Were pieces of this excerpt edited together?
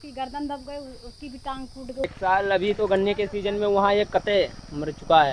yes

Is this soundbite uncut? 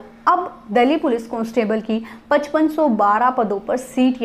yes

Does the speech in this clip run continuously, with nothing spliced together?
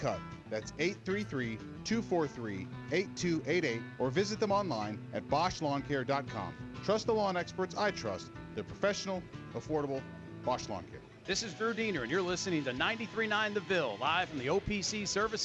no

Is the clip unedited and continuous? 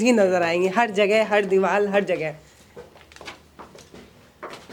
yes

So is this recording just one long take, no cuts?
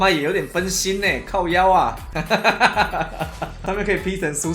no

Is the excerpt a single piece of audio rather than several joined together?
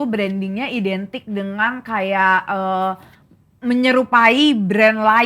yes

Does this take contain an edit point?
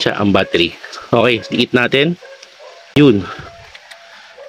yes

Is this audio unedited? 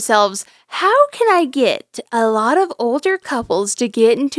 yes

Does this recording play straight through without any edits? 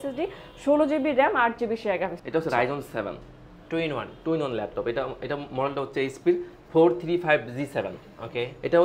no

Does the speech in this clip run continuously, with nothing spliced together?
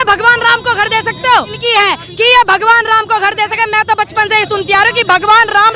no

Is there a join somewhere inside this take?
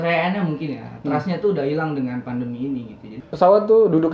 yes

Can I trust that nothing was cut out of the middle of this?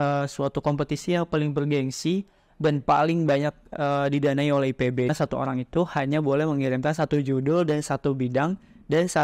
no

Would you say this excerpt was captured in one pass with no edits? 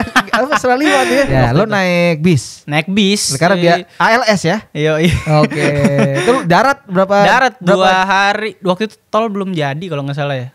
no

